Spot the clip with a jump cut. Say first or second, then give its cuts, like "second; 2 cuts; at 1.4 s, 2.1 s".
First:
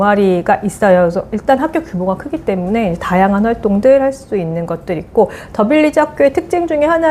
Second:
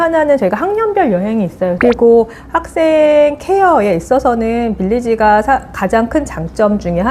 second; 1 cut; at 1.8 s